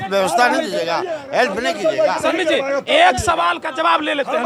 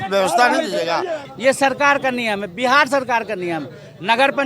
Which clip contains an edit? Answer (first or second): second